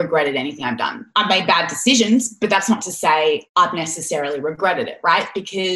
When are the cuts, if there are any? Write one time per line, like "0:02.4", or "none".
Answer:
0:03.5